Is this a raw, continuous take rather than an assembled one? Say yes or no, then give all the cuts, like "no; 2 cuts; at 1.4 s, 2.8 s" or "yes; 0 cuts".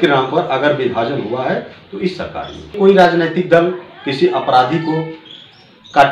no; 1 cut; at 2.7 s